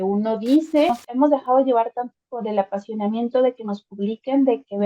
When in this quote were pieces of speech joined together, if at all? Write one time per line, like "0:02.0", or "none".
0:01.0